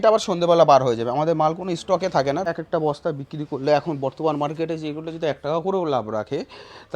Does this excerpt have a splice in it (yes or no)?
yes